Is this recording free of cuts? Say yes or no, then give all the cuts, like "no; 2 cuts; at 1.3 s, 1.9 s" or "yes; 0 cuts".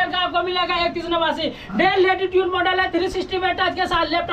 yes; 0 cuts